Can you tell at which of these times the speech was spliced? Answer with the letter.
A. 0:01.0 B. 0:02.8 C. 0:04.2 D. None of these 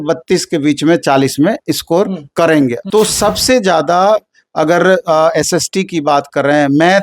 B